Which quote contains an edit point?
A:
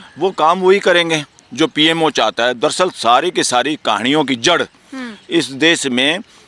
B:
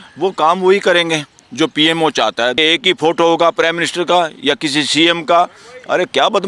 B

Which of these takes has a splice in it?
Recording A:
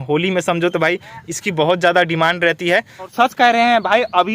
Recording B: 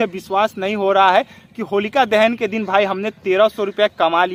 A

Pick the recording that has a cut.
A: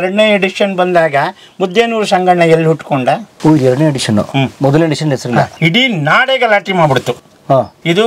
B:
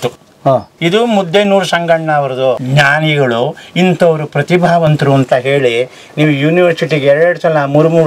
B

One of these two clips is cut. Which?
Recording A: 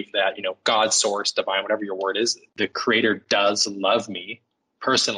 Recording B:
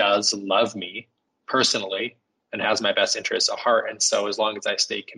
A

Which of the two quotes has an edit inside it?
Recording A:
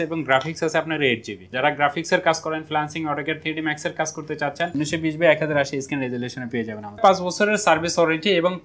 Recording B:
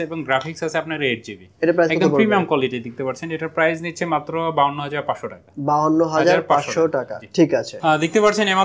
A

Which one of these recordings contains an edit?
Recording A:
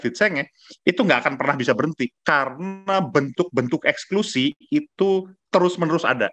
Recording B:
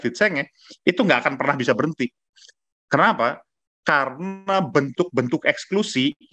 A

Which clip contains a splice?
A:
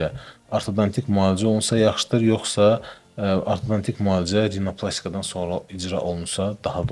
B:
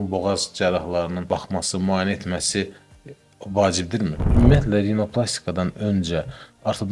B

